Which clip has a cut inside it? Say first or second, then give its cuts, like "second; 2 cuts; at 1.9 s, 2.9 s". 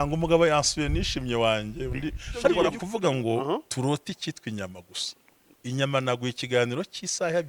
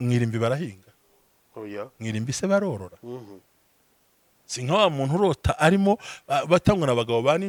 first; 1 cut; at 2.8 s